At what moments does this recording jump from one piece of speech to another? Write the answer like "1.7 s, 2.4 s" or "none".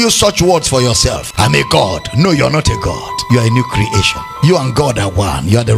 1.2 s, 3.1 s, 4.2 s